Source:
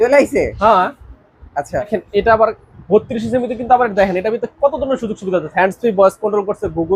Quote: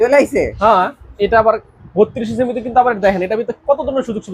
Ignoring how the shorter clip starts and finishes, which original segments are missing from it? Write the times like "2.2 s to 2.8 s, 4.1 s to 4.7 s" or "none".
1.1 s to 2.0 s